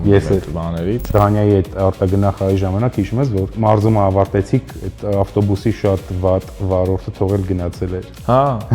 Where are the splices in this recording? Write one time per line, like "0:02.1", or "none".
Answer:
0:01.1
0:03.5